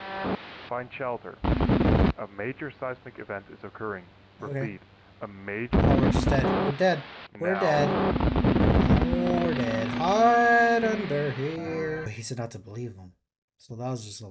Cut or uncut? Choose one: cut